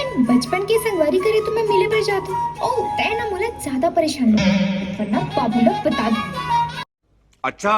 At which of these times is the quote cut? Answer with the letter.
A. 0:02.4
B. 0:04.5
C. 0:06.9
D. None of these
C